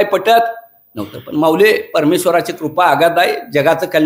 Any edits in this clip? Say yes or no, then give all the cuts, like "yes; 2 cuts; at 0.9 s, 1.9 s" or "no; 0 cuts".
no; 0 cuts